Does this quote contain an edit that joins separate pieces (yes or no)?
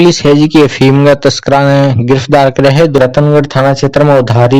yes